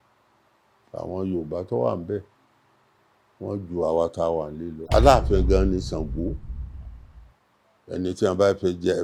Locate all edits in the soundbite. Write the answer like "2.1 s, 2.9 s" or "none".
4.7 s

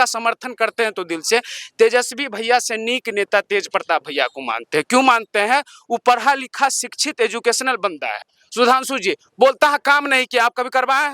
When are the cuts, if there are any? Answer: 8.3 s

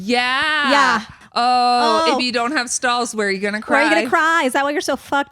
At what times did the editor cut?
1.2 s

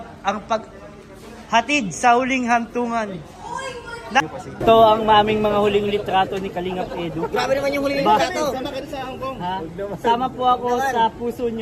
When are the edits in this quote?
4.2 s

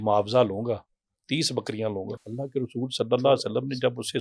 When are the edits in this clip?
2.2 s

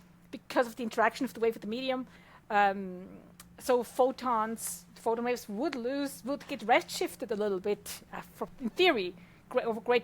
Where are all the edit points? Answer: 8.5 s

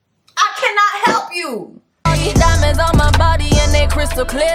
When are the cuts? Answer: 2.0 s

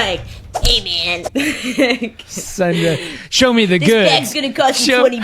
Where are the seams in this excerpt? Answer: none

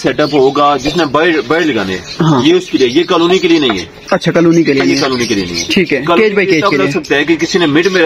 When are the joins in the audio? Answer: none

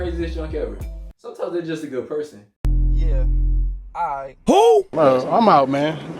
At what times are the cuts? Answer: 4.9 s

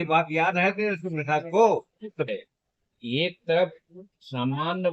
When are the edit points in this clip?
2.3 s

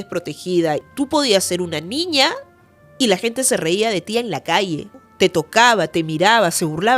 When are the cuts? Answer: 0.9 s, 5.0 s

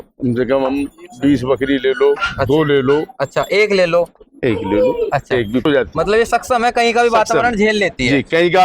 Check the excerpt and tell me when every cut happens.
5.7 s

